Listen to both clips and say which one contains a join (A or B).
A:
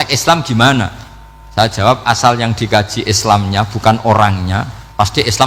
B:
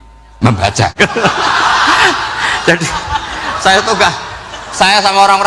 B